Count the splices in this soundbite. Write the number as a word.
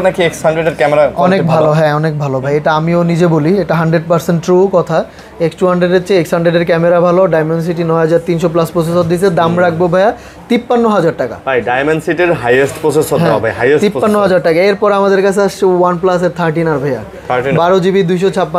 zero